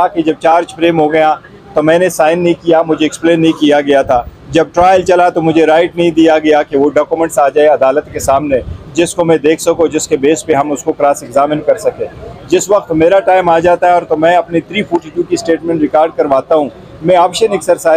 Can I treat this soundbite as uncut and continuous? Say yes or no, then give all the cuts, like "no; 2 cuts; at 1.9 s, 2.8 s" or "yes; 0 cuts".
yes; 0 cuts